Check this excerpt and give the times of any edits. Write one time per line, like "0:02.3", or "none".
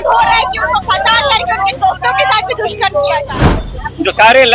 0:03.3